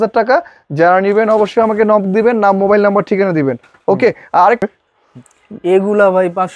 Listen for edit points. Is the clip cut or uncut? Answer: cut